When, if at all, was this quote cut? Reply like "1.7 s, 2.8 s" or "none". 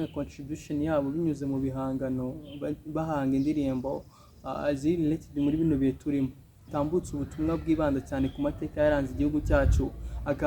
6.5 s